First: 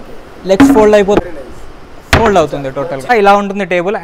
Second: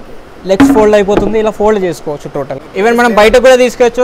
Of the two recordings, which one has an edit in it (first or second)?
first